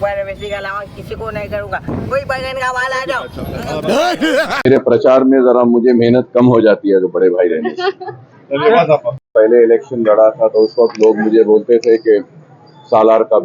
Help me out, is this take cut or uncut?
cut